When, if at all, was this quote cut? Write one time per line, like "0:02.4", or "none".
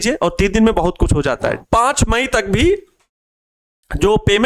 0:01.6